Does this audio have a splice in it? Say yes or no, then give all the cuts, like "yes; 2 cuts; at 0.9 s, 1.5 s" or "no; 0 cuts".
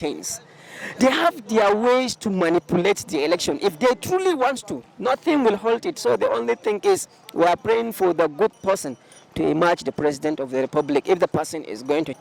no; 0 cuts